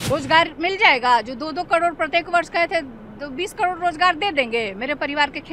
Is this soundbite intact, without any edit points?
yes; 0 cuts

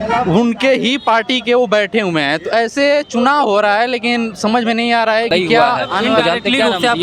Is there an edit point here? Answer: no; 0 cuts

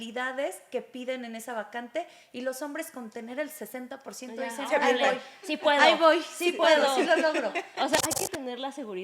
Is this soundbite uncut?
no; 1 cut; at 8.0 s

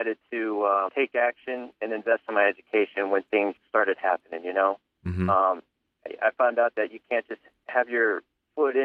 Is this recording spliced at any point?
yes; 2 cuts; at 0.9 s, 3.6 s

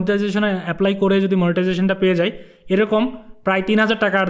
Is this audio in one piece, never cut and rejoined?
yes; 0 cuts

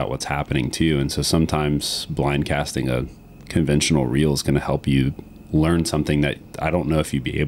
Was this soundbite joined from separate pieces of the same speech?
no; 0 cuts

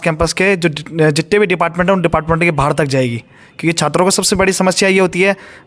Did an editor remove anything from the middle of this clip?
no; 0 cuts

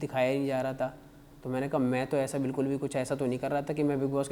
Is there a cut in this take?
no; 0 cuts

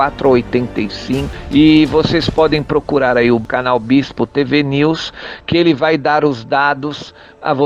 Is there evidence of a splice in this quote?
yes; 1 cut; at 1.3 s

